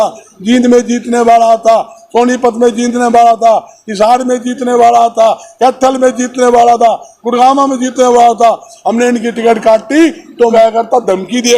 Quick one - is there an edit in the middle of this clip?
yes; 1 cut; at 10.5 s

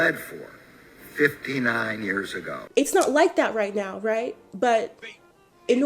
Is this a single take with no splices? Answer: no; 1 cut; at 2.6 s

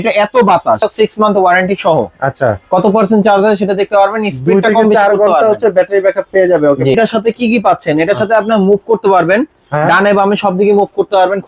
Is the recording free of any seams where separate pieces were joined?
no; 2 cuts; at 0.8 s, 6.9 s

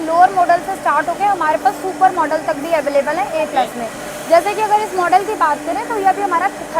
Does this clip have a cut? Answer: no; 0 cuts

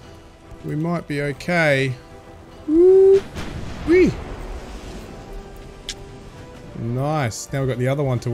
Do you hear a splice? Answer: no; 0 cuts

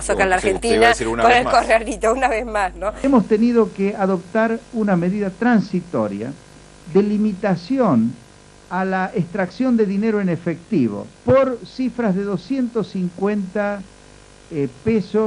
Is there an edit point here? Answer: no; 0 cuts

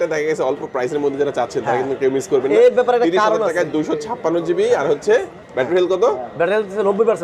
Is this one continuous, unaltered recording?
yes; 0 cuts

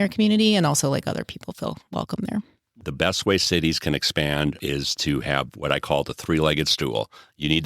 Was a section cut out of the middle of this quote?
yes; 1 cut; at 2.6 s

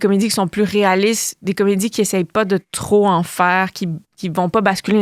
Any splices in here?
no; 0 cuts

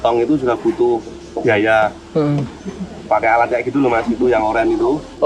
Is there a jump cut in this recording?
no; 0 cuts

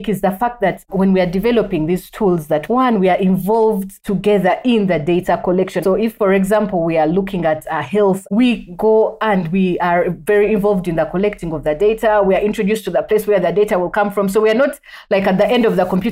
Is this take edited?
yes; 3 cuts; at 2.6 s, 6.0 s, 8.2 s

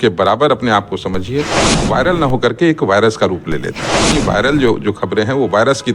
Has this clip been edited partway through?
yes; 2 cuts; at 1.7 s, 4.2 s

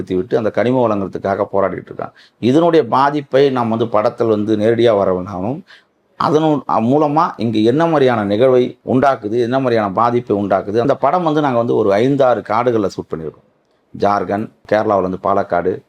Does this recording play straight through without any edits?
no; 3 cuts; at 8.8 s, 10.9 s, 14.6 s

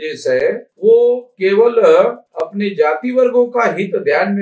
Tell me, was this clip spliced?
no; 0 cuts

